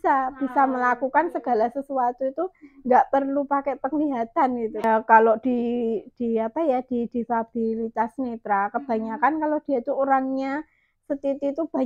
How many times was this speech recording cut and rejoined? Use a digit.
1